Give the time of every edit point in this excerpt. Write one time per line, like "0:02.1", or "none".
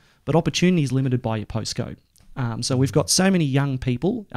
none